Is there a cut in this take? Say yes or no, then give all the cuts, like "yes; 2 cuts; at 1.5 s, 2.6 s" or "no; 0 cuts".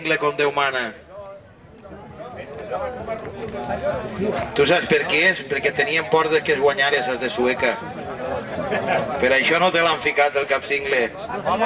no; 0 cuts